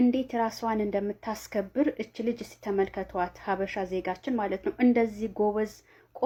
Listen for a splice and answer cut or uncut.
uncut